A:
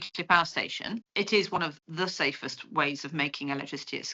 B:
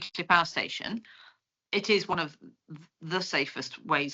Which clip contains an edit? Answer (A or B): A